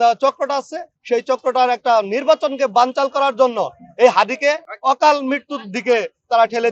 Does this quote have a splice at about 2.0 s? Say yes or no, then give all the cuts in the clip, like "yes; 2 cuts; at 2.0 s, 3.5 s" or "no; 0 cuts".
no; 1 cut; at 4.7 s